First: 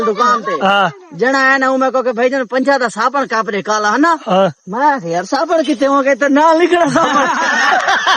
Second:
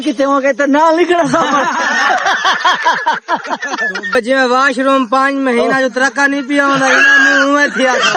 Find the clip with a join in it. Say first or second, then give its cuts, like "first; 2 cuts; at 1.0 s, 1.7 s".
second; 1 cut; at 4.1 s